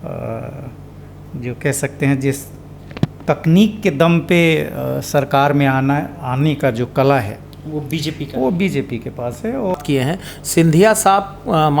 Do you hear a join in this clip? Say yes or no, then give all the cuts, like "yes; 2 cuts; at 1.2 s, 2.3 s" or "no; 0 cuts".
yes; 1 cut; at 9.8 s